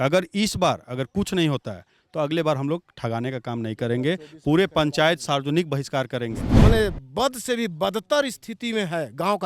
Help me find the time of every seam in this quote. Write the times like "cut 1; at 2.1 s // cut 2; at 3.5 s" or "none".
cut 1; at 6.5 s